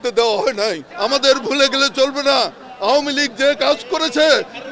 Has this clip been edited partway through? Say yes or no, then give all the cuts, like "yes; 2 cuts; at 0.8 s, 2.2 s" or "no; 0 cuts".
yes; 1 cut; at 0.9 s